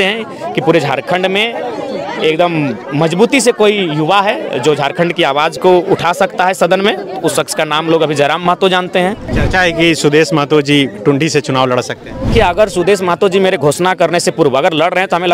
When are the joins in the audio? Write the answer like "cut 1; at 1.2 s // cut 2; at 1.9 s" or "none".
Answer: cut 1; at 9.3 s // cut 2; at 12.3 s